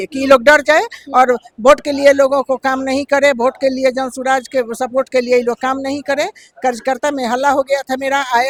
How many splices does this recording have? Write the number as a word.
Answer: zero